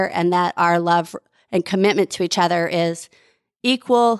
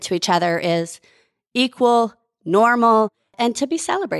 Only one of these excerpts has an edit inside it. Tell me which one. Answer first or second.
second